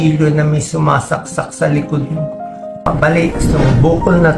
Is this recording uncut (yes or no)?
no